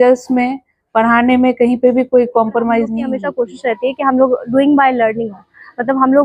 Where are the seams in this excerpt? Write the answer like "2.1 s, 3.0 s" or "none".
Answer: 3.1 s